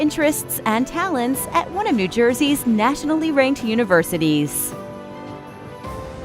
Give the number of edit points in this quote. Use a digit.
1